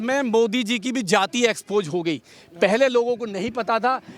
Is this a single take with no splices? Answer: yes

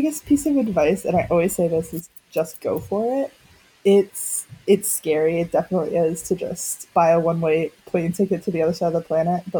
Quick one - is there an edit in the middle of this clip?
no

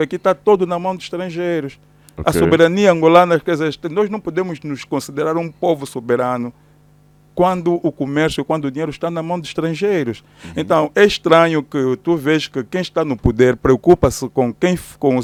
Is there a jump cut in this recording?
no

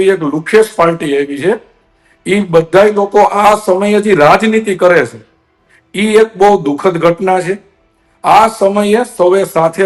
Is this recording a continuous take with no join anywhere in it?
yes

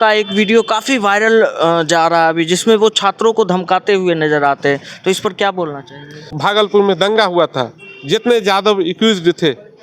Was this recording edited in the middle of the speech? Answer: yes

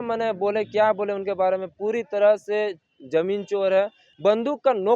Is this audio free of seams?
no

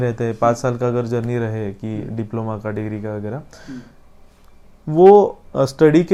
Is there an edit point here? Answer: no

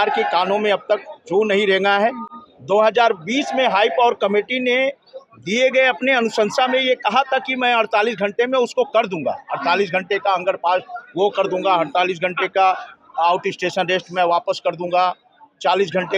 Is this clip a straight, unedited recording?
yes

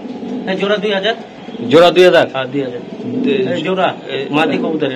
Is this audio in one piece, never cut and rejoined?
yes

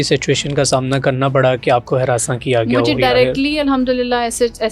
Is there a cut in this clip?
no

